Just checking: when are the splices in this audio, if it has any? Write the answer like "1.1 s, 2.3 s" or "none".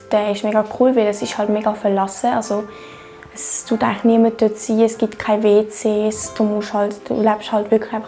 none